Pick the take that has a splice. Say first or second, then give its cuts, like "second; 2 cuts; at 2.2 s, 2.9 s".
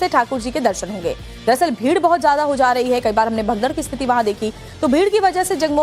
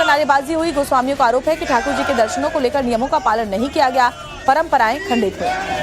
second; 1 cut; at 4.5 s